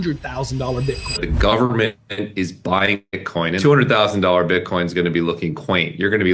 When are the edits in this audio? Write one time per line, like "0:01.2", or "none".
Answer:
0:01.2
0:03.6